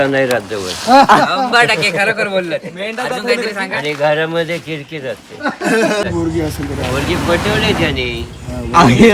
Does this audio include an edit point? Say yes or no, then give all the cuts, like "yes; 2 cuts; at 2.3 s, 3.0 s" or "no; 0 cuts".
yes; 1 cut; at 6.0 s